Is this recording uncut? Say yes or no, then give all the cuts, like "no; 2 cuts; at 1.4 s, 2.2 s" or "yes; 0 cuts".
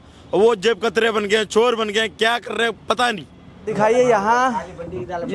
no; 1 cut; at 3.7 s